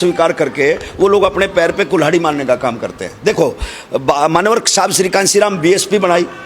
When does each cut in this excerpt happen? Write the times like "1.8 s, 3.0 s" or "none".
none